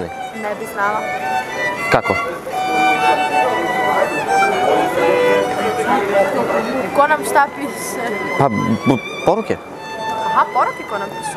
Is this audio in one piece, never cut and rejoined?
yes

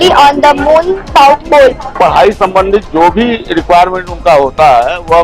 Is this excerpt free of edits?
no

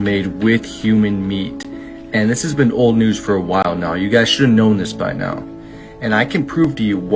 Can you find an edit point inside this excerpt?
no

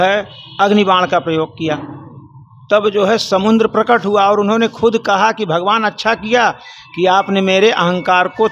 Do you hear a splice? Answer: no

